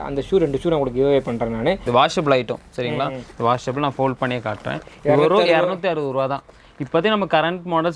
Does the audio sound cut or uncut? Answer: cut